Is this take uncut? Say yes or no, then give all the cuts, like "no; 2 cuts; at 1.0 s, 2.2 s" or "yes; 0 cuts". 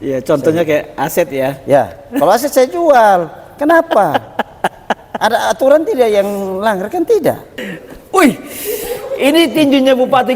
no; 1 cut; at 7.6 s